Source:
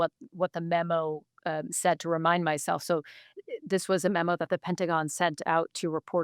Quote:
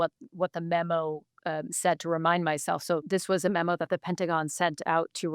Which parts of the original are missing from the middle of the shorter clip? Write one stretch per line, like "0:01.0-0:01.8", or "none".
0:03.0-0:03.6